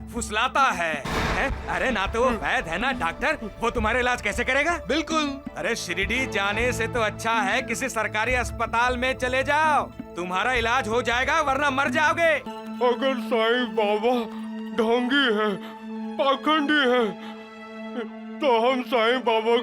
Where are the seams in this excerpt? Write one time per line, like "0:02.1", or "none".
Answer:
0:12.5